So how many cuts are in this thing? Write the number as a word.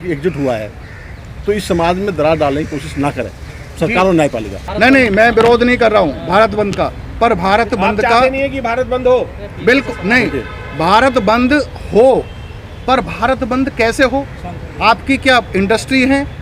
one